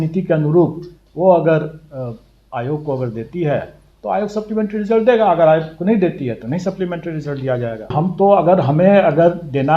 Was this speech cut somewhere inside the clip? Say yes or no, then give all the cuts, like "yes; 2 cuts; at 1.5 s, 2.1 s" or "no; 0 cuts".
yes; 1 cut; at 7.9 s